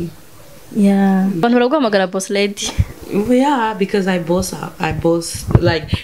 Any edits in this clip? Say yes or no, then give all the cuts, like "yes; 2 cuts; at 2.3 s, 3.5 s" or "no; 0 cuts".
yes; 1 cut; at 1.4 s